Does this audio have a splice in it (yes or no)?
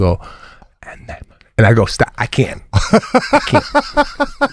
no